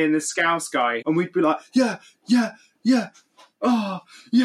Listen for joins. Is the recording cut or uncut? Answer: cut